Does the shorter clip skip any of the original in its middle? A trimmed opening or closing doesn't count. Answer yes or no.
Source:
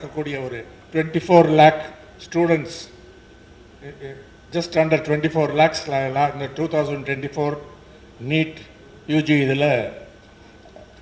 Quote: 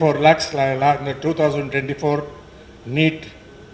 no